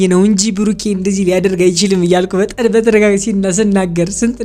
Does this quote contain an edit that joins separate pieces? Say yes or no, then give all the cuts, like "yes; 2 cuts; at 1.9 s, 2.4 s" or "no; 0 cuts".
no; 0 cuts